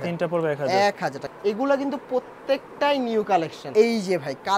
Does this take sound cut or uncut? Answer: cut